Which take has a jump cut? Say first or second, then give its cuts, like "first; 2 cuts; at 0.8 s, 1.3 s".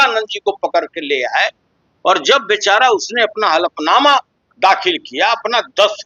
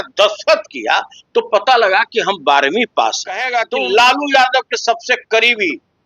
second; 1 cut; at 3.5 s